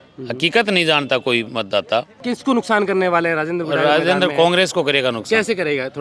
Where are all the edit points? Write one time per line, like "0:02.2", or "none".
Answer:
0:02.2